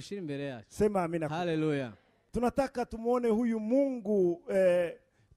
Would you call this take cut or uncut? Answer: cut